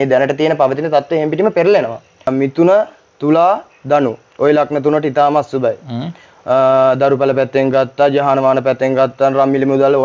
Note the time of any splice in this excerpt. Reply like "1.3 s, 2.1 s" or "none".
2.3 s